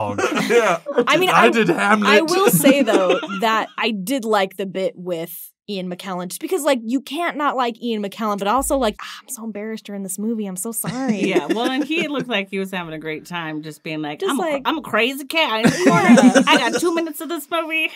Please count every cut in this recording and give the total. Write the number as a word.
three